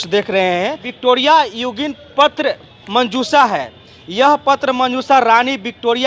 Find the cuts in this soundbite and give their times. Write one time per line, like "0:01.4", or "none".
0:00.9